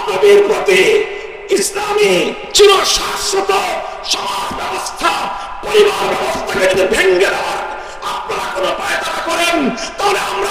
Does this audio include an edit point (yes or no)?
no